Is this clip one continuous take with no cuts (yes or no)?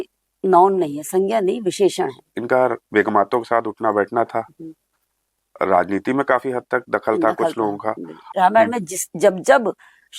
no